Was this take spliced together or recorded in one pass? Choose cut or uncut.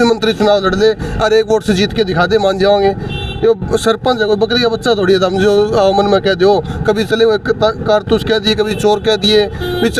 uncut